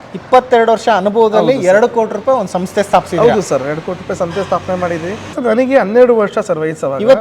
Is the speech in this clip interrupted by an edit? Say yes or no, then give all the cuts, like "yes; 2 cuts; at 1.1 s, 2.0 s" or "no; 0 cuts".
yes; 1 cut; at 5.3 s